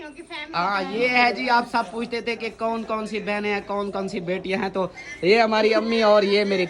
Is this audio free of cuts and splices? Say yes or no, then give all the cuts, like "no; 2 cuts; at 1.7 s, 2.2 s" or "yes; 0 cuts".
yes; 0 cuts